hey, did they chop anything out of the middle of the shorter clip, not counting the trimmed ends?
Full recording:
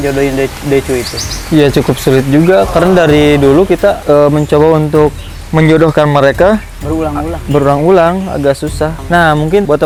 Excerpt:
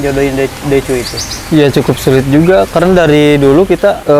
no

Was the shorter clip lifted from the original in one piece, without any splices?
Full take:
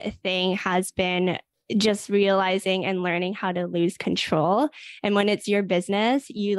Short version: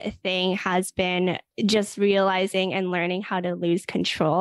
no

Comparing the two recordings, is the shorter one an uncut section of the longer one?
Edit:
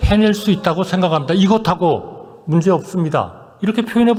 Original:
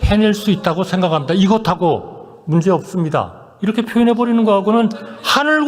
yes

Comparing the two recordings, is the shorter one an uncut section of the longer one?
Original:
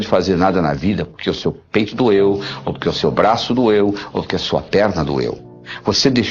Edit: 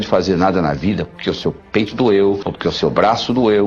no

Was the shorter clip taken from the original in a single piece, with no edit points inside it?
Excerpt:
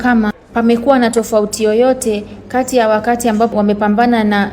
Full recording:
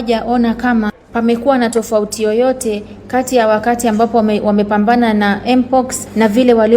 no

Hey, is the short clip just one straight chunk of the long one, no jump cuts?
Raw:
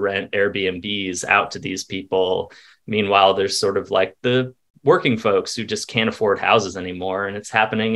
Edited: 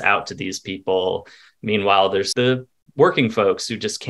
no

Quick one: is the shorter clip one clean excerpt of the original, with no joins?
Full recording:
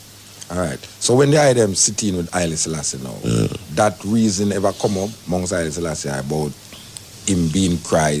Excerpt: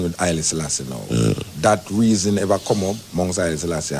yes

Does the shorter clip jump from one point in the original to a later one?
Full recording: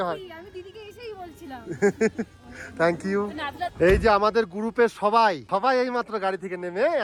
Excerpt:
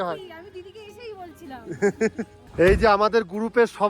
yes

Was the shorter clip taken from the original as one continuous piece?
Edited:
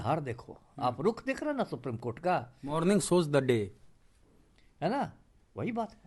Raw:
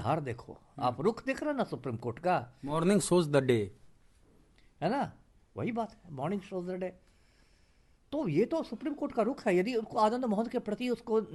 yes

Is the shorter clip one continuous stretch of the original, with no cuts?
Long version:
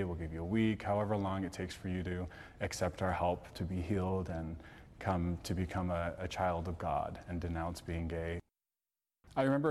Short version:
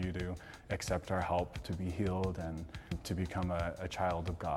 no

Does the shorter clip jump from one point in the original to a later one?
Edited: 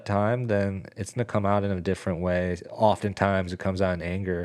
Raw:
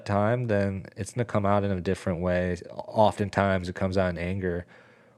yes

